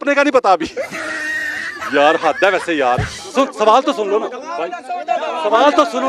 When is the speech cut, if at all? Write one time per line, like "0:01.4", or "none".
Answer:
0:03.2

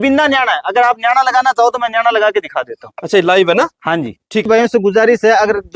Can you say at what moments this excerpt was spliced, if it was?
0:04.5

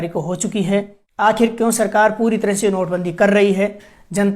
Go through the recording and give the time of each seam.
0:01.0

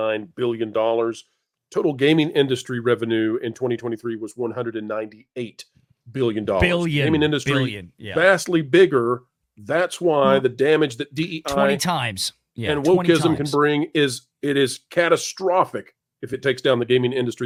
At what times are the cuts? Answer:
none

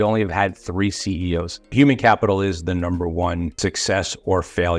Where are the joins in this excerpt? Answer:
0:01.7
0:03.8

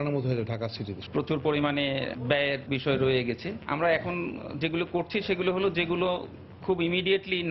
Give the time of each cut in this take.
0:01.0
0:02.2
0:03.5

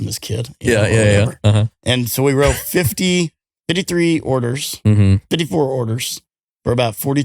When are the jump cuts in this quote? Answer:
0:03.5

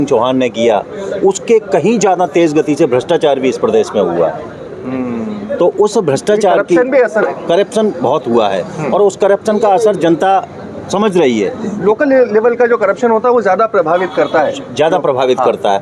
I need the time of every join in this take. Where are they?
none

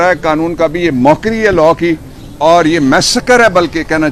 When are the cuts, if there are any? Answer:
none

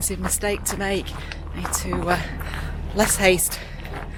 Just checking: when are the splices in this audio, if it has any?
none

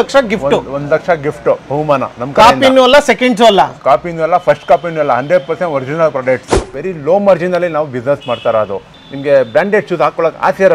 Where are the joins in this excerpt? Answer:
0:06.6
0:08.9

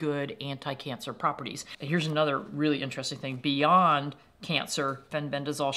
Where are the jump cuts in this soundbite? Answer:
0:01.7

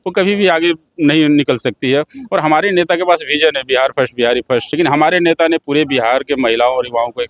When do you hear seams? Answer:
0:04.7

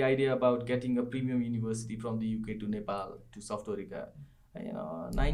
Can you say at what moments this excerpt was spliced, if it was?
none

